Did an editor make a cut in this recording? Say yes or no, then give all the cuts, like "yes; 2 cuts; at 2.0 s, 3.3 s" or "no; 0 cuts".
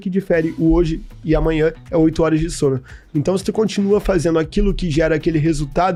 no; 0 cuts